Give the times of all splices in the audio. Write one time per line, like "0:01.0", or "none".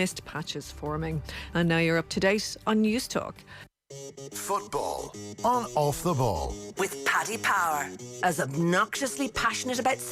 0:03.8